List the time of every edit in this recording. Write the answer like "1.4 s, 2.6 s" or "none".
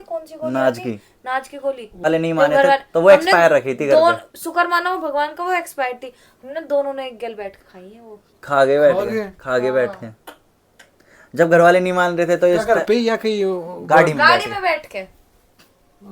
2.0 s